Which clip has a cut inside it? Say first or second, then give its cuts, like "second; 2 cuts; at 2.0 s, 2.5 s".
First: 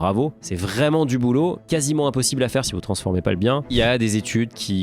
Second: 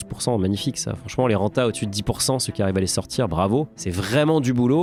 first; 2 cuts; at 2.7 s, 3.7 s